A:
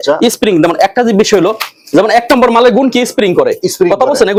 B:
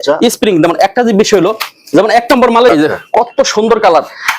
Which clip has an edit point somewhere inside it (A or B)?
B